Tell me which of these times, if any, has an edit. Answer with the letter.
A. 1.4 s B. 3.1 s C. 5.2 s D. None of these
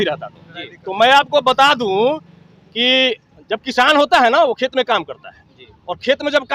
D